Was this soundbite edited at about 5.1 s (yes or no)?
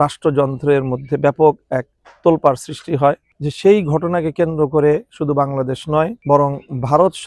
no